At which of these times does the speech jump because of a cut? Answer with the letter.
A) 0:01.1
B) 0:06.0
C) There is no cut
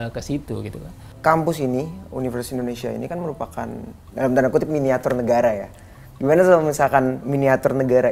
A